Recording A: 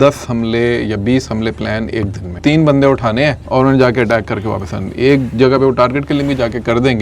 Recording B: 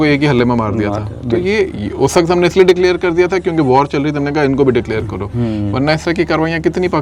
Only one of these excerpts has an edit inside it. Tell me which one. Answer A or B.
A